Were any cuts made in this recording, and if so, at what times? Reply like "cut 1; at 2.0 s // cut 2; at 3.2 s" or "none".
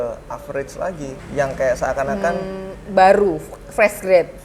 cut 1; at 1.1 s

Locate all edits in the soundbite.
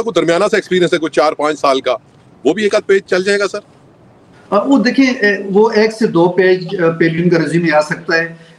none

